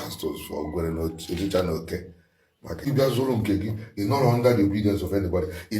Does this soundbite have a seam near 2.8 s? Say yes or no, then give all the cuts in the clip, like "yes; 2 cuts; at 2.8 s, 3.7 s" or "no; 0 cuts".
yes; 1 cut; at 2.8 s